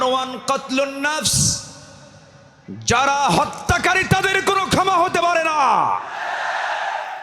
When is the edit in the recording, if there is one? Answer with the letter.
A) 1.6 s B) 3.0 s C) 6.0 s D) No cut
D